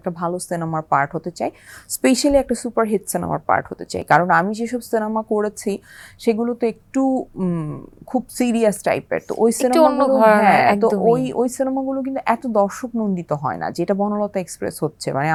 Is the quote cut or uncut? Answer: uncut